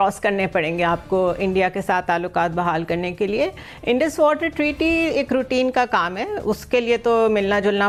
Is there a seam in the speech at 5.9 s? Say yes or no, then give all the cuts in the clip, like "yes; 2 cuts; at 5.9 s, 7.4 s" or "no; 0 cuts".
no; 0 cuts